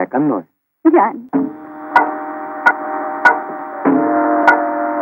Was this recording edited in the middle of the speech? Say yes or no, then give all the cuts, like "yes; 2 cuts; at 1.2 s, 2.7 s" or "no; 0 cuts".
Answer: yes; 1 cut; at 1.2 s